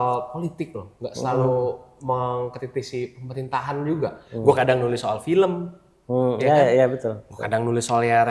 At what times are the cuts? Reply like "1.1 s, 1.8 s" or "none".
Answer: none